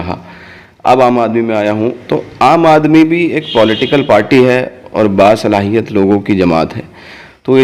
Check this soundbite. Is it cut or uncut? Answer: uncut